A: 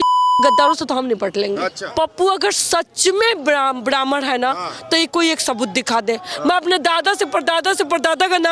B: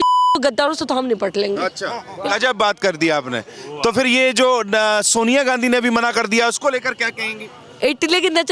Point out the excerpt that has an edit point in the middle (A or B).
A